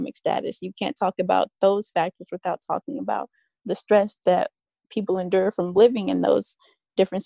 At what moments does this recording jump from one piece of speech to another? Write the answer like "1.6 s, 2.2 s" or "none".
none